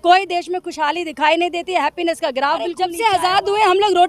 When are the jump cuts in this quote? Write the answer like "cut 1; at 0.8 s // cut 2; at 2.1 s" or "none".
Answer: cut 1; at 3.0 s

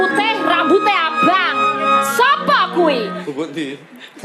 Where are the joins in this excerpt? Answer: cut 1; at 3.2 s

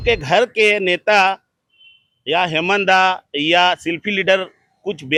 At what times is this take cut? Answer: none

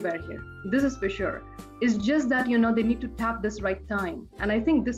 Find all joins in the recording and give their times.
none

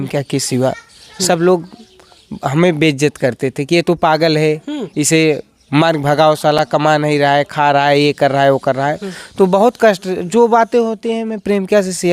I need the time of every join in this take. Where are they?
none

